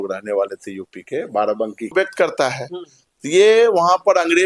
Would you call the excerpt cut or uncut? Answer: cut